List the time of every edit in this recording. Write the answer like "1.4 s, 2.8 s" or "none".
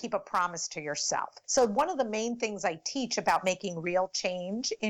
1.4 s